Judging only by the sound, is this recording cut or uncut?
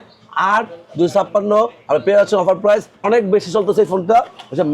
cut